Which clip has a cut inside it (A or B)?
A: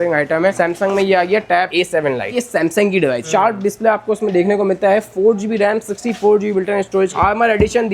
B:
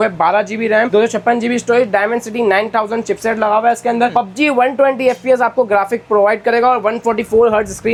A